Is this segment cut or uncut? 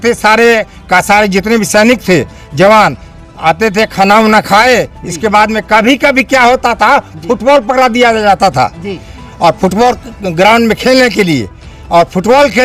uncut